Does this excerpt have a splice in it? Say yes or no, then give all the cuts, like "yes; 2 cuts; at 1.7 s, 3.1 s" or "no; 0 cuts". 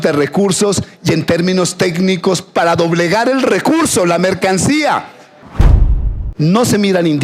yes; 1 cut; at 5.8 s